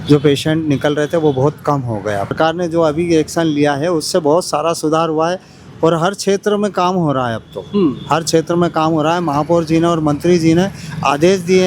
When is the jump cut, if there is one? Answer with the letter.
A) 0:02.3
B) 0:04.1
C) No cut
A